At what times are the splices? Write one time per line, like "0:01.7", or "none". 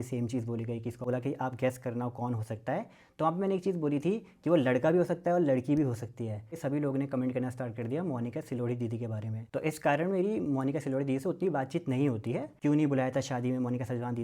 0:01.0
0:06.5
0:09.3
0:12.5